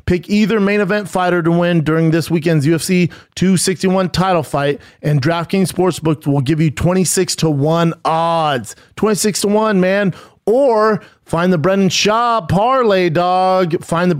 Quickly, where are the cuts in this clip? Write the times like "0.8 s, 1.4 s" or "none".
none